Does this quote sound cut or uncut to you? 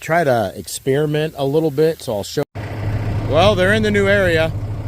cut